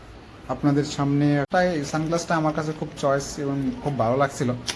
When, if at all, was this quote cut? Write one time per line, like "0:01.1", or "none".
0:01.5